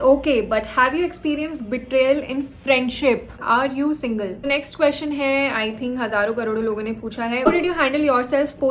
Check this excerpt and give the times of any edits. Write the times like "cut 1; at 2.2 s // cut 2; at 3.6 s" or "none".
cut 1; at 3.4 s // cut 2; at 4.5 s // cut 3; at 7.5 s